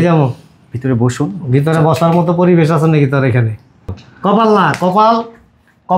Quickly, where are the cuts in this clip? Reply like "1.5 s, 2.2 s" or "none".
4.0 s